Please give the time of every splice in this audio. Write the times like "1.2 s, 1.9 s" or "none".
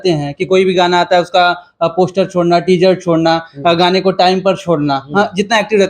none